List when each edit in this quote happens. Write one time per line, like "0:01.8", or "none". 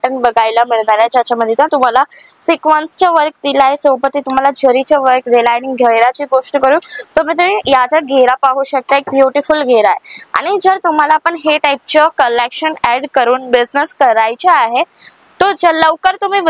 none